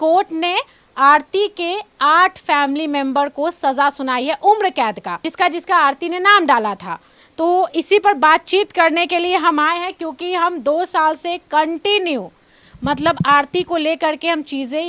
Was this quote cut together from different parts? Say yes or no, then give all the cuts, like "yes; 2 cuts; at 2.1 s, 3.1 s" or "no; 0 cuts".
no; 0 cuts